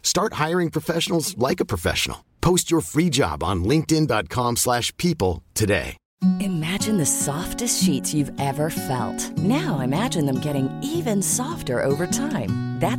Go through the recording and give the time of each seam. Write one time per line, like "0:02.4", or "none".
0:06.0